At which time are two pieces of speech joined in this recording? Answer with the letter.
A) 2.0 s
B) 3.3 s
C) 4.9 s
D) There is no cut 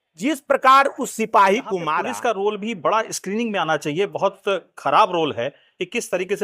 A